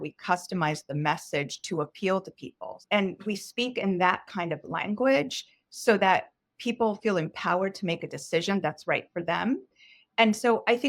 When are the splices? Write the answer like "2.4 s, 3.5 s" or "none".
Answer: 2.8 s